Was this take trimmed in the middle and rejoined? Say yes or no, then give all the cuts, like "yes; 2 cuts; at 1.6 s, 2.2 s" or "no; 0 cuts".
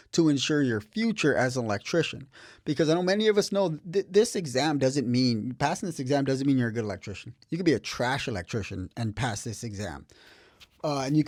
no; 0 cuts